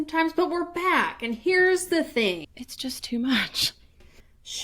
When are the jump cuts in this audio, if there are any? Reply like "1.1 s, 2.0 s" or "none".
2.5 s